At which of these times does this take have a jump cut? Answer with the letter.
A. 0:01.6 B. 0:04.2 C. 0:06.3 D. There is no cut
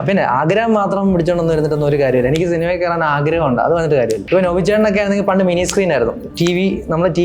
B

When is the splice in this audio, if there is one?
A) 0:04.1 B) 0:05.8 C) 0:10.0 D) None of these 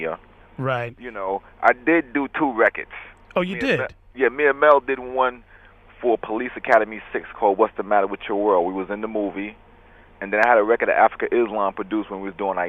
D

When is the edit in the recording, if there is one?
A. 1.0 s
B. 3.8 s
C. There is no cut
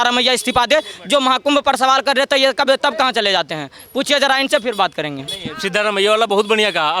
C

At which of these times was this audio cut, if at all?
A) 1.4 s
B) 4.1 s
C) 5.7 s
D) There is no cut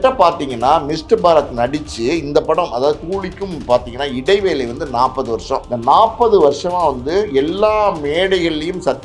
C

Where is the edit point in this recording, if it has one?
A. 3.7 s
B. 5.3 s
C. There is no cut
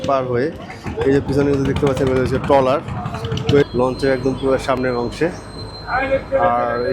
A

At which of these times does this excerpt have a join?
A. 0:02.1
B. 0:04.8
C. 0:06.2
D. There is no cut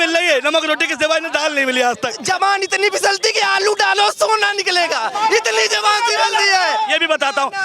A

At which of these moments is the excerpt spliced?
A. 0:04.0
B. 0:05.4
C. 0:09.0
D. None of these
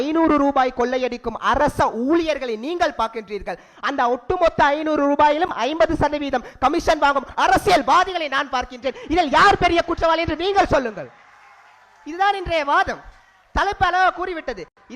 D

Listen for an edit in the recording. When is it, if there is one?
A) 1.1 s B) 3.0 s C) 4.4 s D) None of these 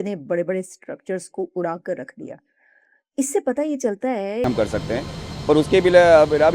C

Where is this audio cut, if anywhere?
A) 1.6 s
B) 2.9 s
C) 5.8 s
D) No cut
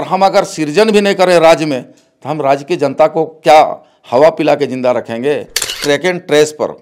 C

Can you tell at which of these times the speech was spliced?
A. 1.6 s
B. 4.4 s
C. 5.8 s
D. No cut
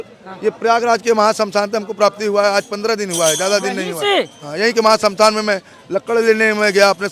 D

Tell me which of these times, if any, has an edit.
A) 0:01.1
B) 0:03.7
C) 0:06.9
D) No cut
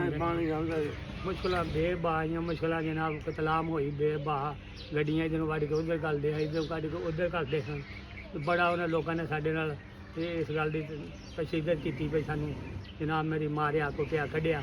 A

